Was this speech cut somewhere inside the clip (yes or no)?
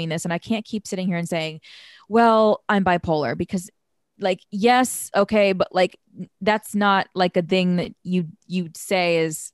no